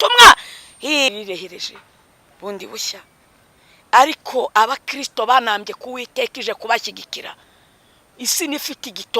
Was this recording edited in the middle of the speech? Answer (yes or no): yes